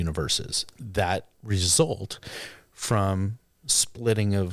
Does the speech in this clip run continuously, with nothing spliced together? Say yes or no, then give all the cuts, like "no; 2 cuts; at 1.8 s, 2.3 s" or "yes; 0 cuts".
yes; 0 cuts